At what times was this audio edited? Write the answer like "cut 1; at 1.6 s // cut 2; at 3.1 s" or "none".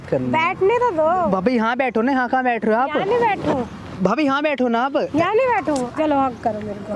cut 1; at 5.9 s